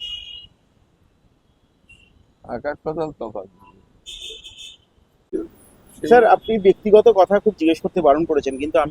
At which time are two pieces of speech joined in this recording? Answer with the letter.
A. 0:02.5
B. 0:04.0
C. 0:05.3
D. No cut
C